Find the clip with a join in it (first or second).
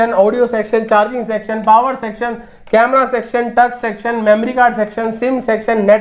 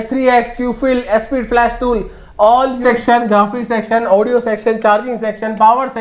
second